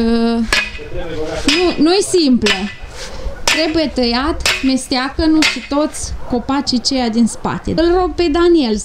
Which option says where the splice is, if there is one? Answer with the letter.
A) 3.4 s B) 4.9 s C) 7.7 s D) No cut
C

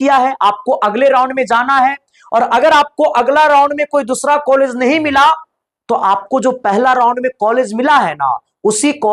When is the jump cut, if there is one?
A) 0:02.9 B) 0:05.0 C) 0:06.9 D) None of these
D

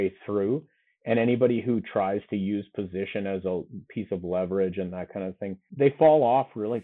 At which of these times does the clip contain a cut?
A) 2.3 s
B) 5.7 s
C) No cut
B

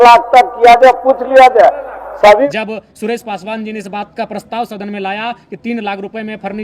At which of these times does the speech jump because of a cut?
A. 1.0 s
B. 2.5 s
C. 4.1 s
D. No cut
B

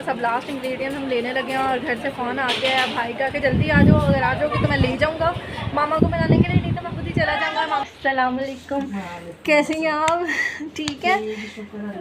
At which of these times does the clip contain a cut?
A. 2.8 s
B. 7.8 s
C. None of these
B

